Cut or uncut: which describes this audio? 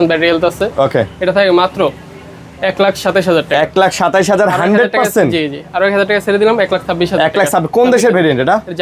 uncut